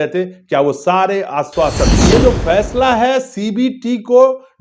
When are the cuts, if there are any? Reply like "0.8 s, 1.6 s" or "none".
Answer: 2.0 s